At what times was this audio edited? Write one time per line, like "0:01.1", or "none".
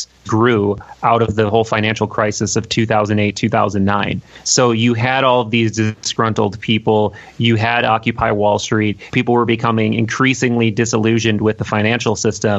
0:09.1